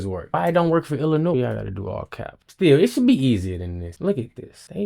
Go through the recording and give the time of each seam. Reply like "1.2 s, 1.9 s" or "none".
3.9 s